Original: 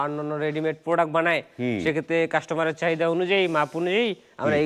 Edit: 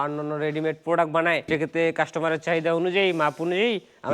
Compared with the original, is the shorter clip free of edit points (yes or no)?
no